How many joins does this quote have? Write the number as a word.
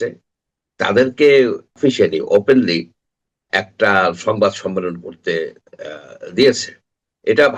one